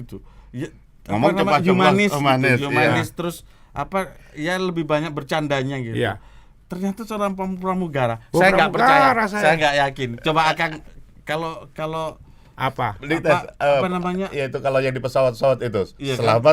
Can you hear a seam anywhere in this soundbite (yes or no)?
no